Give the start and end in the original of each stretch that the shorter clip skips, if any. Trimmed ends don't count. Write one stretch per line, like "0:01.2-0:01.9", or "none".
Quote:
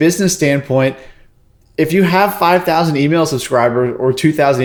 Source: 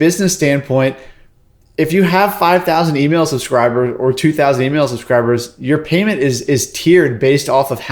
none